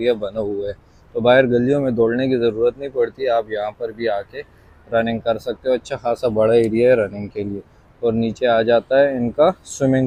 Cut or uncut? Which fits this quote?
uncut